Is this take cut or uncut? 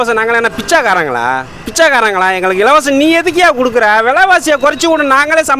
cut